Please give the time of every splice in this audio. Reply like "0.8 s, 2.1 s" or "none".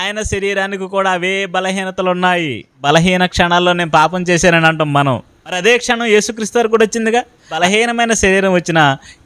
2.8 s, 5.6 s, 7.6 s